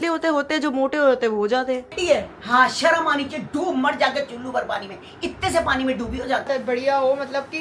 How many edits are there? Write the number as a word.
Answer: two